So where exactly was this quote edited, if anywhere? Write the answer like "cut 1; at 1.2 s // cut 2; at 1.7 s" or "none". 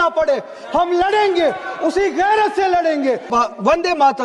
cut 1; at 3.3 s

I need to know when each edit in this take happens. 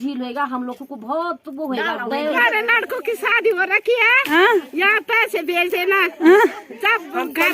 cut 1; at 2.3 s

